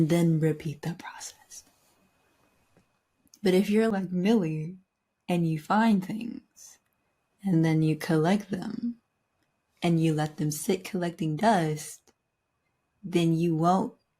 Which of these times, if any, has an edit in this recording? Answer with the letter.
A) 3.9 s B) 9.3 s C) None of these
A